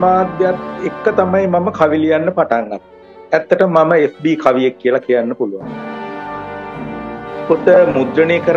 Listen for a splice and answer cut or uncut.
cut